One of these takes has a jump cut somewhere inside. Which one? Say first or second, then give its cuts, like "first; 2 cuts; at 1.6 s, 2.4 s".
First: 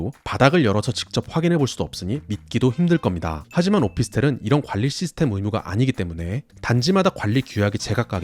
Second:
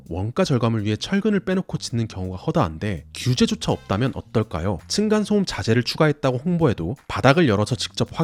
first; 1 cut; at 3.4 s